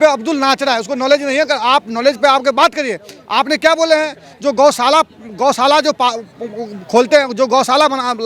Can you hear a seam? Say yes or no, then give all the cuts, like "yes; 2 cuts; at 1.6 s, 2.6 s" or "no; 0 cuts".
no; 0 cuts